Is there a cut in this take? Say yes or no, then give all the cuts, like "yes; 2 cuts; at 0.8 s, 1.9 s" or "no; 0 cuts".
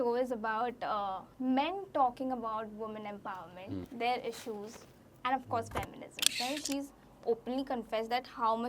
yes; 3 cuts; at 1.2 s, 3.9 s, 6.3 s